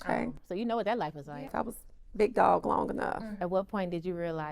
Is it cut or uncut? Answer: cut